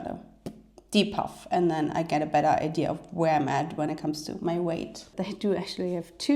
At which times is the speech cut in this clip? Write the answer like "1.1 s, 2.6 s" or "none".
5.0 s